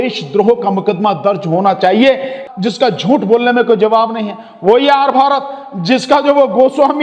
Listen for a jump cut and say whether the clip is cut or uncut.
cut